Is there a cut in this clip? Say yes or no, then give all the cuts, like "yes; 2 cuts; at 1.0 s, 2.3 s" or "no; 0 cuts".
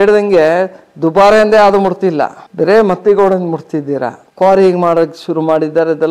yes; 2 cuts; at 2.4 s, 4.3 s